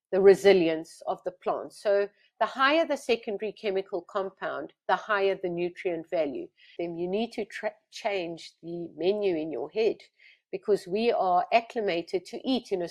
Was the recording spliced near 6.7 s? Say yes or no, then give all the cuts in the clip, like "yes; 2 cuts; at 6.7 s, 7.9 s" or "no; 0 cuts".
yes; 1 cut; at 6.7 s